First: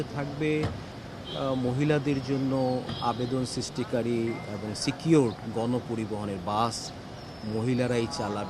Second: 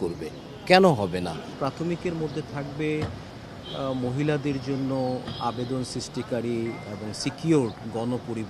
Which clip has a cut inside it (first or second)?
second